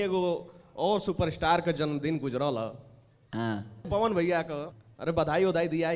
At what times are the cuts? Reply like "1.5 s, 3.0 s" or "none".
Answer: 3.8 s, 4.7 s